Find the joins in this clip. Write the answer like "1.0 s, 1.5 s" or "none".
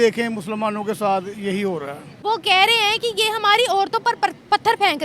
2.1 s